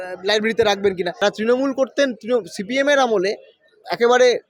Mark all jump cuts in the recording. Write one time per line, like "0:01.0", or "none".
0:01.2